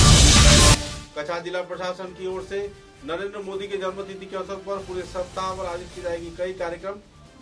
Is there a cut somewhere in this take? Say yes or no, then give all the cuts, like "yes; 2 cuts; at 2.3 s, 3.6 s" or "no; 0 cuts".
yes; 1 cut; at 0.9 s